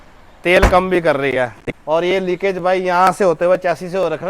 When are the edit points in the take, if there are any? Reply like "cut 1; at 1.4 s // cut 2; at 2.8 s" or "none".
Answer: cut 1; at 1.6 s